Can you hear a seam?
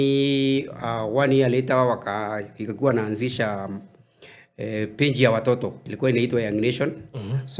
yes; 1 cut; at 5.9 s

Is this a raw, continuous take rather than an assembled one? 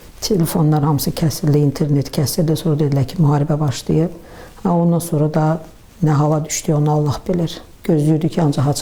yes; 0 cuts

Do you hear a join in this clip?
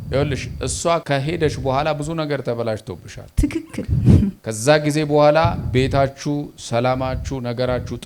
yes; 2 cuts; at 1.0 s, 4.5 s

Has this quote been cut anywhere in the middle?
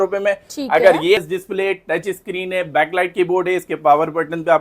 yes; 1 cut; at 1.2 s

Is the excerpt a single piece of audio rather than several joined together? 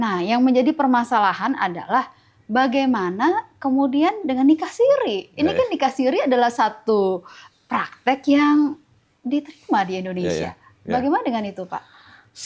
yes; 0 cuts

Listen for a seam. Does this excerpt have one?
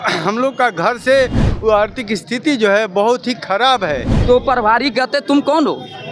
yes; 2 cuts; at 1.4 s, 4.1 s

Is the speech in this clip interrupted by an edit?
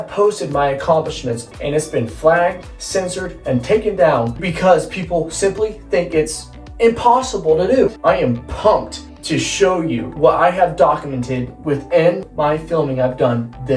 yes; 5 cuts; at 1.4 s, 4.4 s, 8.0 s, 10.1 s, 12.3 s

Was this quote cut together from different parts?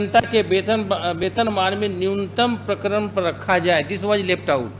no; 0 cuts

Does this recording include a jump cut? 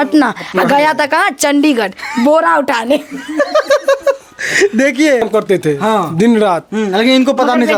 no; 0 cuts

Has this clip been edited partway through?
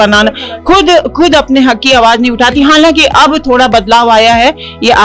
no; 0 cuts

